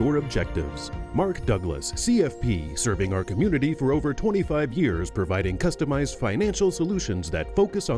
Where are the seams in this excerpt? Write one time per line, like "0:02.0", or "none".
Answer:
none